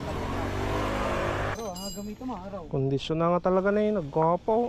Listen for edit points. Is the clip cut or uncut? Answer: cut